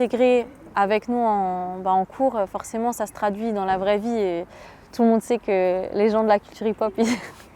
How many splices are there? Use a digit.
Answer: 0